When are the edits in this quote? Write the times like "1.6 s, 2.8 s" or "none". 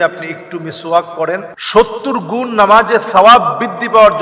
1.6 s